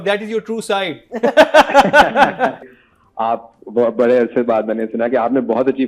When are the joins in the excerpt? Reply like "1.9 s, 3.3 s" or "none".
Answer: 2.6 s

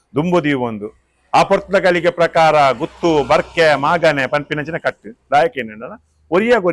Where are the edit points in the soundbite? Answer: none

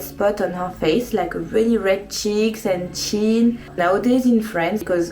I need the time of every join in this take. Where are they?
3.7 s

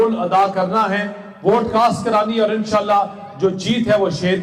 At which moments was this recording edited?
none

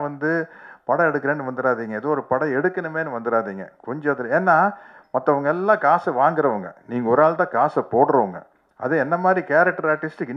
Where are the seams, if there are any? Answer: none

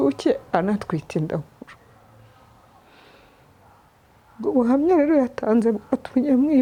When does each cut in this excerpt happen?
none

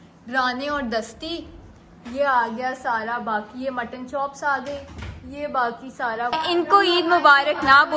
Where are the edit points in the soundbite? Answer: 6.3 s

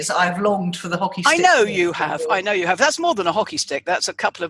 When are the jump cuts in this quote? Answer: none

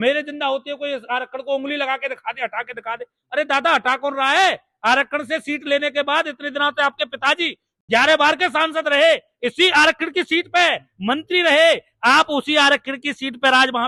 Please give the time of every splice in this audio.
none

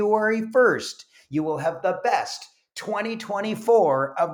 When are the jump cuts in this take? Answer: none

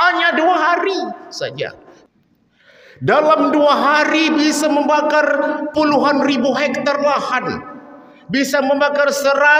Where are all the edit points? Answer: 1.9 s

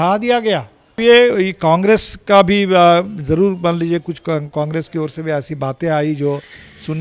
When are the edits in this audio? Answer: 1.0 s

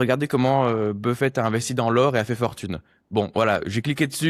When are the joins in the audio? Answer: none

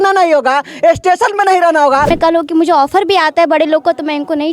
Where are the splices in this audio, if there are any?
2.1 s

